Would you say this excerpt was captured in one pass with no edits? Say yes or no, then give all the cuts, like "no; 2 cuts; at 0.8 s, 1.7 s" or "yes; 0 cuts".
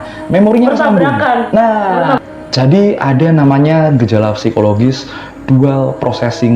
no; 1 cut; at 2.2 s